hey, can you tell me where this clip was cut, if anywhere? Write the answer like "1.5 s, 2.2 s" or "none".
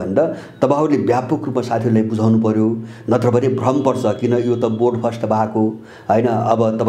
none